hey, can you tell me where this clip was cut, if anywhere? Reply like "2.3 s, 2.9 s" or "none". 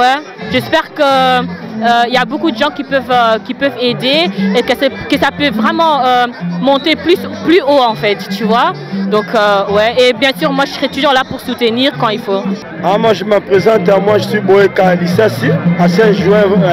12.6 s